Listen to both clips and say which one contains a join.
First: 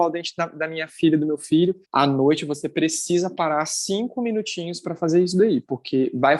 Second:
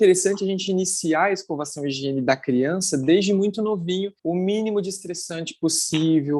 second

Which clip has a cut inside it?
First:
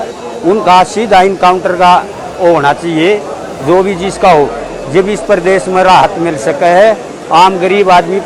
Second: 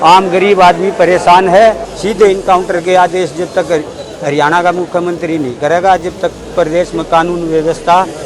second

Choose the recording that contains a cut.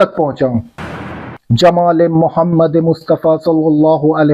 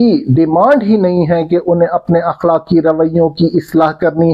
first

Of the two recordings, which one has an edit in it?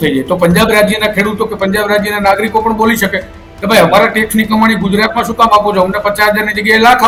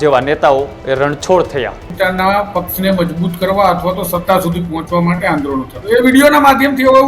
second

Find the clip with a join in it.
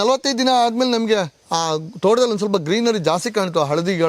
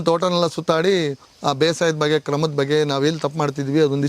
second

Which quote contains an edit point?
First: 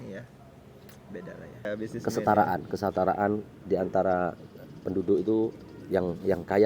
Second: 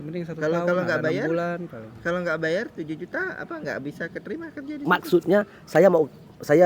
first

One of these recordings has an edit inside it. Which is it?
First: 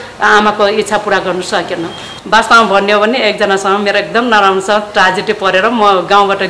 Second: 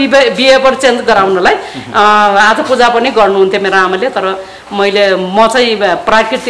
first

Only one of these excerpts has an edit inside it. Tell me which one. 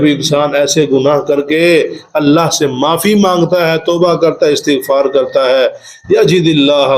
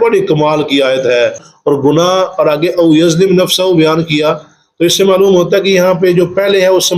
second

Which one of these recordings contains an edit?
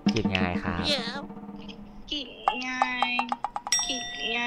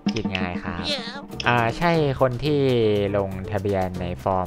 second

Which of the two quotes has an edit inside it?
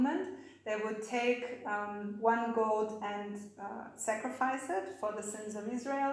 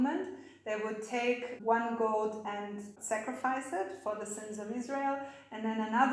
second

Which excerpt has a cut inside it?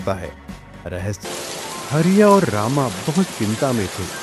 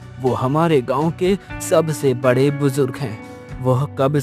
first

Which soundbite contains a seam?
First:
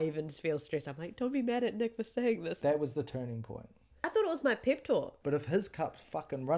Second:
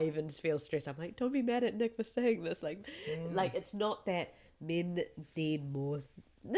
first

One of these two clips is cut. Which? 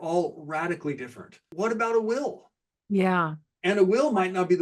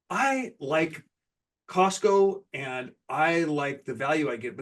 first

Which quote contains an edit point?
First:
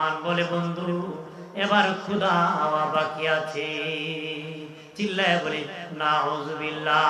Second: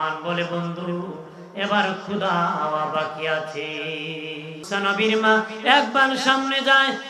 second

